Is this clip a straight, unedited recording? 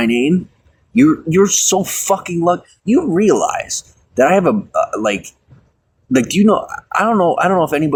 yes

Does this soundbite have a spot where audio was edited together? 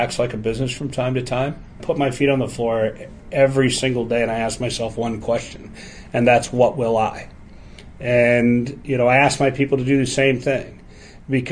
yes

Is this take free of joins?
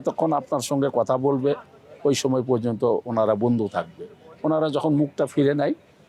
yes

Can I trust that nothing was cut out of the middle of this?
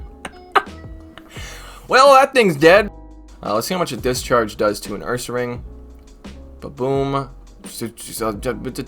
no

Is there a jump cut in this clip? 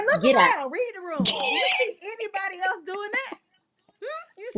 no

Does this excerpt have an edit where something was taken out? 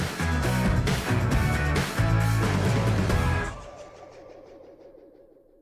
no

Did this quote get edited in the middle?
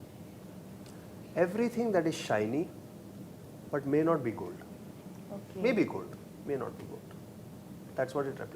no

